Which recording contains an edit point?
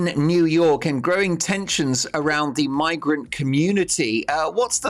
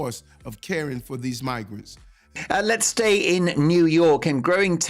second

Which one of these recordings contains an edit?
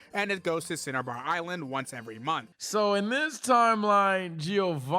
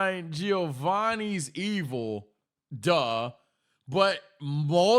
first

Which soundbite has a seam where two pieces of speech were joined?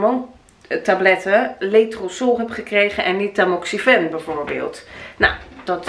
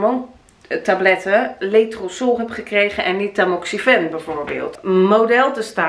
second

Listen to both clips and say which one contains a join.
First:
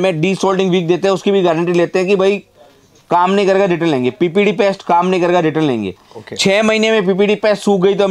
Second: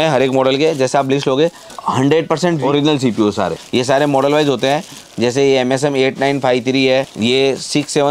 second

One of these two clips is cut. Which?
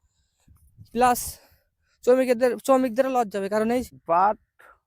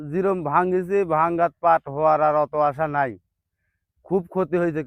first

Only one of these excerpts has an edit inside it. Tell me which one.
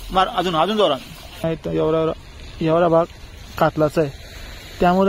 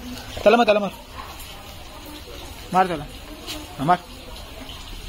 first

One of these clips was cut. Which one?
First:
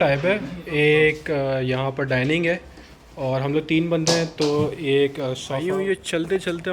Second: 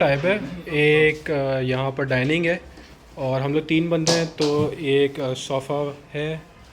first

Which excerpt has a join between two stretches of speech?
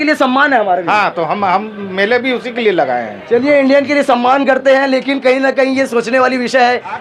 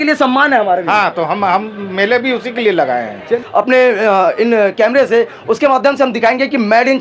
second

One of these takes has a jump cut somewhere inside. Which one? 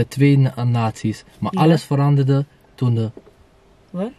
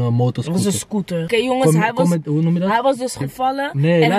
second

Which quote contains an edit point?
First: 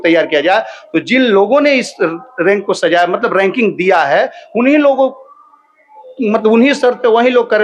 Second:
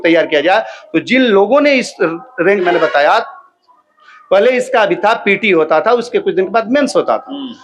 second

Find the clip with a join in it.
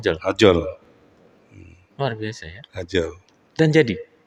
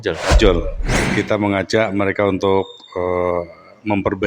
second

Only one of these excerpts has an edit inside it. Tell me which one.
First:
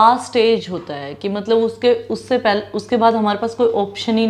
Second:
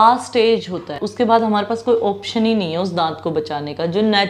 second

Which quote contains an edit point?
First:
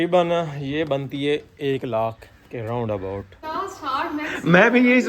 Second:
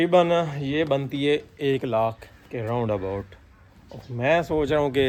first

